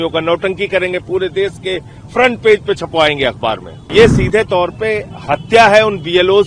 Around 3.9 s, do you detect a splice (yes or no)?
yes